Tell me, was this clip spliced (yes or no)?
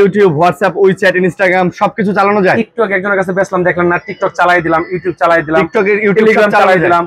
no